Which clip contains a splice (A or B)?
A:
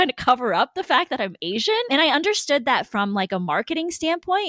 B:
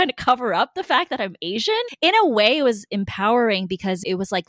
B